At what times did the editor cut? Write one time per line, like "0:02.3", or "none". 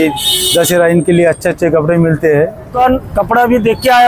0:02.7